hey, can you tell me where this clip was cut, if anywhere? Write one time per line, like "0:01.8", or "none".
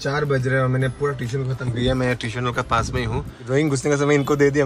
0:03.5